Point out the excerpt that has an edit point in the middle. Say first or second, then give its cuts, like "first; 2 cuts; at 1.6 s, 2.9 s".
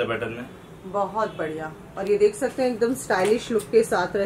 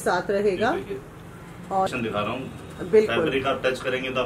second; 1 cut; at 1.9 s